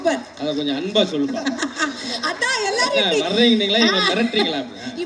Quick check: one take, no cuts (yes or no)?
yes